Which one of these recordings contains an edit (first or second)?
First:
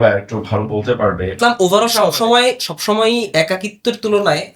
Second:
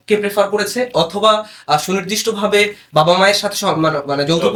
first